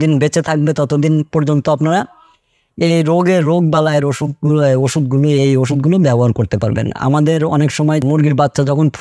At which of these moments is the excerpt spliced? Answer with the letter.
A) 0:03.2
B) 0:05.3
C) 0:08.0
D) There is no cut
C